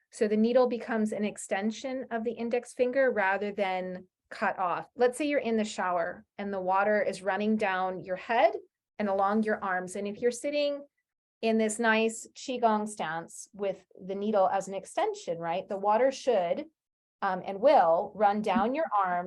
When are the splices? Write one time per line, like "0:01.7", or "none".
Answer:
0:04.9